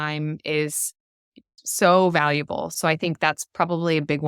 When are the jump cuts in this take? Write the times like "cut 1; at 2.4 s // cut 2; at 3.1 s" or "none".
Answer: cut 1; at 1.5 s // cut 2; at 2.7 s